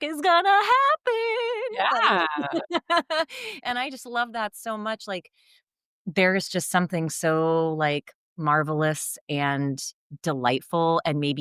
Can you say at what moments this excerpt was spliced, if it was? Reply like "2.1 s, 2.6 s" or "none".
none